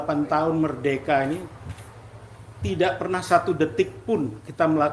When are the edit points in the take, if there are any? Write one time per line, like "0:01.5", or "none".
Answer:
none